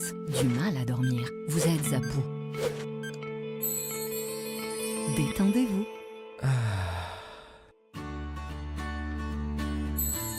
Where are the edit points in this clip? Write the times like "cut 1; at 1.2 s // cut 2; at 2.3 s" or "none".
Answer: none